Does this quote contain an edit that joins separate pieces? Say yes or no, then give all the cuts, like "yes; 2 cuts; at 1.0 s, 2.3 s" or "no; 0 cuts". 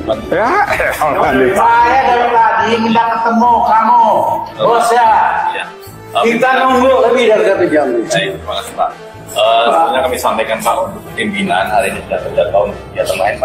no; 0 cuts